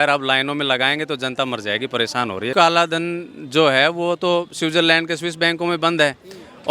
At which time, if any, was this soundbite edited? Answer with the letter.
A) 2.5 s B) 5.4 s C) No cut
A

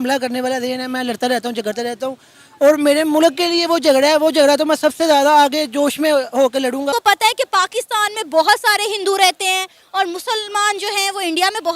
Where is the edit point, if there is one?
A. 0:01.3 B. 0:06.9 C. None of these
B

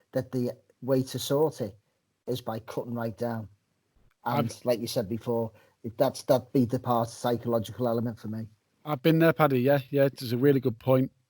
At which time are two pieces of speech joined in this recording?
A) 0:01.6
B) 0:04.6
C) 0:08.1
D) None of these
D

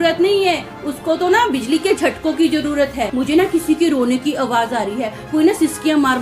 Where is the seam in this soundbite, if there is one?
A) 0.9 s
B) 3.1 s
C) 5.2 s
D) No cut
B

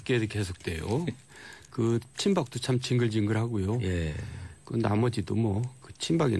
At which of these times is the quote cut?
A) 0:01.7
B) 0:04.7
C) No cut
C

